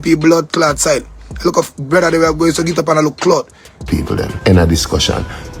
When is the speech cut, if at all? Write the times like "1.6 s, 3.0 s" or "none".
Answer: 3.9 s